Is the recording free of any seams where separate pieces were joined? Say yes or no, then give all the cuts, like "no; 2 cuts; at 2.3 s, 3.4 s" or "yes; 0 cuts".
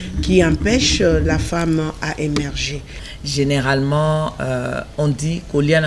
no; 1 cut; at 2.9 s